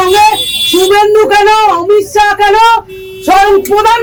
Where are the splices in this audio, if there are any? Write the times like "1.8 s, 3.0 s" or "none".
none